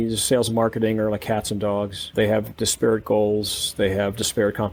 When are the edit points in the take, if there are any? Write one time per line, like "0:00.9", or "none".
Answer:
none